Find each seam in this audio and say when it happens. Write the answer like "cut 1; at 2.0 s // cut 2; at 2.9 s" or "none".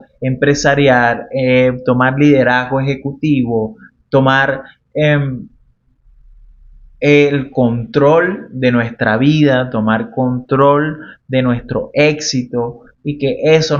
none